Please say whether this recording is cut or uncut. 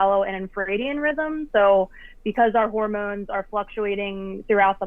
uncut